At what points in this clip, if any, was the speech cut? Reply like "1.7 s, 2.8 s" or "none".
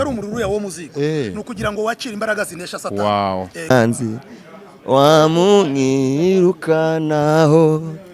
3.7 s